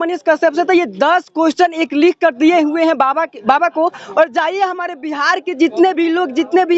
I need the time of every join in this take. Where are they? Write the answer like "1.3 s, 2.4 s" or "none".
none